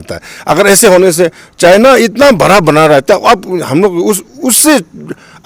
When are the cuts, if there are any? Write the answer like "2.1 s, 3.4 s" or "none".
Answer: none